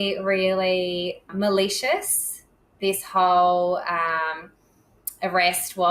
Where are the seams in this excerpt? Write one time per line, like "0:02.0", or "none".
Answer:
0:01.3